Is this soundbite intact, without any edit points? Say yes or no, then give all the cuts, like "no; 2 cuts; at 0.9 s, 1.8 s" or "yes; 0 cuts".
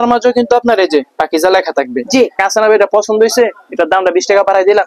no; 1 cut; at 2.4 s